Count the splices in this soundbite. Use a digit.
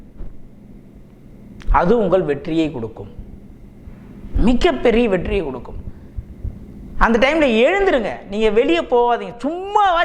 0